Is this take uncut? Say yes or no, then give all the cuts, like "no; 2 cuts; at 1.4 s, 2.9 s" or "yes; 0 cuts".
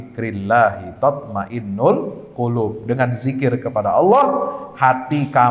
yes; 0 cuts